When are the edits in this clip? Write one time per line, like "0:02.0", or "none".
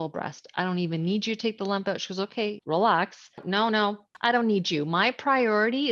0:02.6
0:03.7